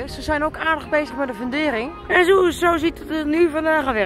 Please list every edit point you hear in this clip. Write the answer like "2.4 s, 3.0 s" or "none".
2.0 s